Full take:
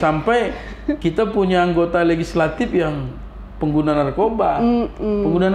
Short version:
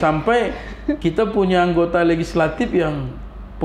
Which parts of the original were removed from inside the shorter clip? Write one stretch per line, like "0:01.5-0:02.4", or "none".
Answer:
none